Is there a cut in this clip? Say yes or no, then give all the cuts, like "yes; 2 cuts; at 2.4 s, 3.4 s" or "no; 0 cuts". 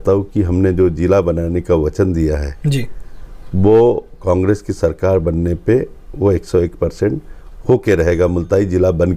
no; 0 cuts